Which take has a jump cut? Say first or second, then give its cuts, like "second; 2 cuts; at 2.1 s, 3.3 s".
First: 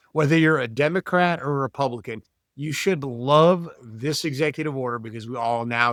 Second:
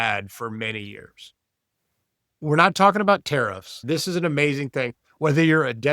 second; 2 cuts; at 2.3 s, 3.8 s